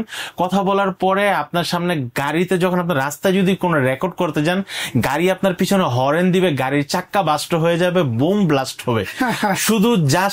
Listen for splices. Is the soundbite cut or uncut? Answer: uncut